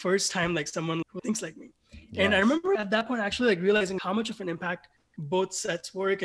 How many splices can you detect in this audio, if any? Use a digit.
3